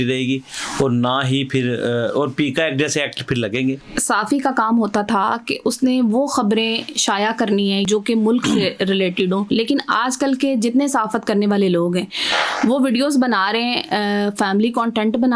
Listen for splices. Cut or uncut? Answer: cut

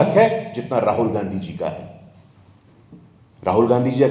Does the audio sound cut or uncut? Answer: uncut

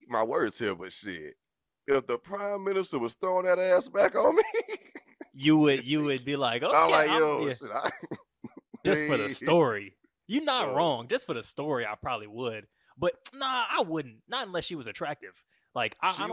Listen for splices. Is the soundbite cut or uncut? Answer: uncut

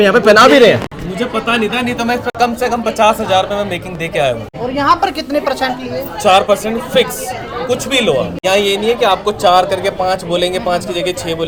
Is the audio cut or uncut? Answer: uncut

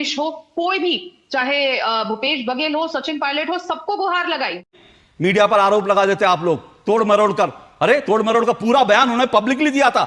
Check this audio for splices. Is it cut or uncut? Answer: cut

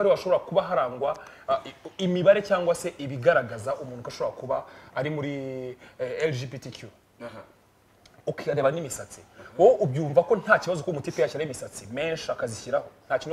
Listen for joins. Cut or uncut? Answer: uncut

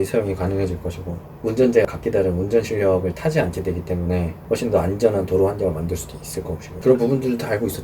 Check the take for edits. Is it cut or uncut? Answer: cut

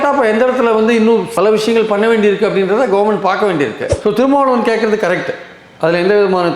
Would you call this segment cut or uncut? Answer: cut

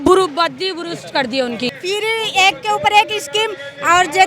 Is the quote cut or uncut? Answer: cut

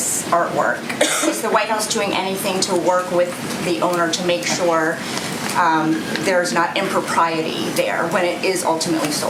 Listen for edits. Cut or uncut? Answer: uncut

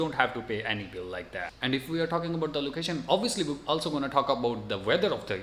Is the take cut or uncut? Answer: cut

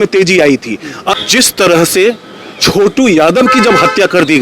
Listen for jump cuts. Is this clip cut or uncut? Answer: cut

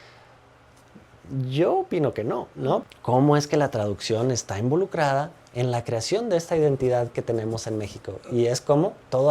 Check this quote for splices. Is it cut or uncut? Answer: cut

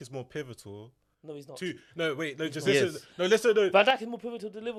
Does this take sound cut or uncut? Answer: uncut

